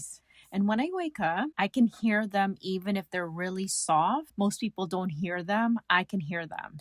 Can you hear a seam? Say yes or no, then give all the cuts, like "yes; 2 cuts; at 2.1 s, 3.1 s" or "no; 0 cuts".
yes; 1 cut; at 1.5 s